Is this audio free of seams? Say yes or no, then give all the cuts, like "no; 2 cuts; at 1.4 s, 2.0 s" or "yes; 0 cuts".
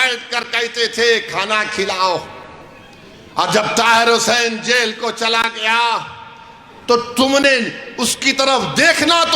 yes; 0 cuts